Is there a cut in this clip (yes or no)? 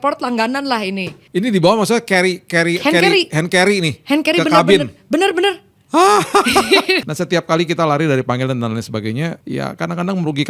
yes